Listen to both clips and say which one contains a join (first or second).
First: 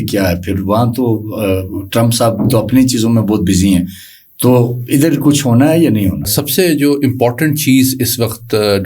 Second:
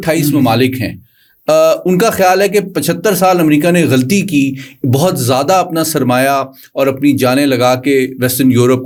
first